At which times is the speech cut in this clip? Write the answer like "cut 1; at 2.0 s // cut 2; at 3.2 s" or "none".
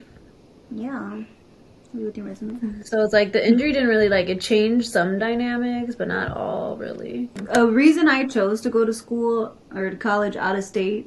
cut 1; at 7.4 s